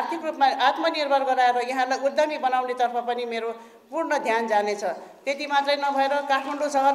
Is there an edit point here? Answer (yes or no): no